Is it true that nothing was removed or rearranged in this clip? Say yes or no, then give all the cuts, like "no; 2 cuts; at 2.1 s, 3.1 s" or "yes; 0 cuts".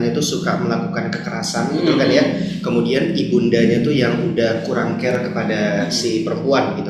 yes; 0 cuts